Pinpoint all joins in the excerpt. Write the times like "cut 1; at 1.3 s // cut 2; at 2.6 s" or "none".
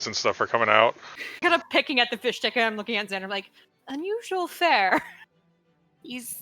cut 1; at 1.4 s